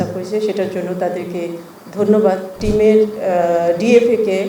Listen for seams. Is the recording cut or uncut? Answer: cut